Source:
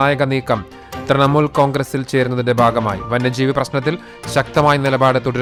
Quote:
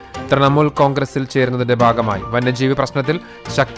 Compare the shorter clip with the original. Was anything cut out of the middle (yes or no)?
no